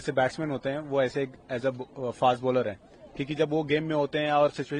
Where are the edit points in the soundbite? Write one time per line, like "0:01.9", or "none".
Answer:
none